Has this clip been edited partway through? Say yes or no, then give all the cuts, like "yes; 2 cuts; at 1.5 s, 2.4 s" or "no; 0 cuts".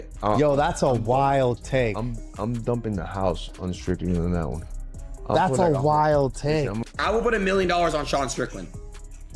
yes; 1 cut; at 6.8 s